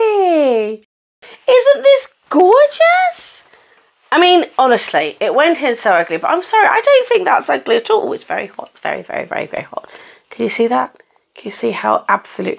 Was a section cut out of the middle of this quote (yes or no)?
no